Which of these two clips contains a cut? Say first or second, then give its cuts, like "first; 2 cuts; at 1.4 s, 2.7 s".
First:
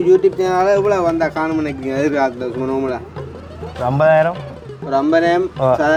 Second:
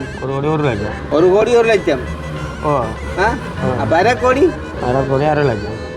second; 2 cuts; at 1.0 s, 4.7 s